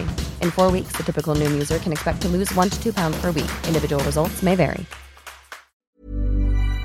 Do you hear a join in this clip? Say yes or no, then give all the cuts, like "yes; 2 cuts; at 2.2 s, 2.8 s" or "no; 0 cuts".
yes; 1 cut; at 5.8 s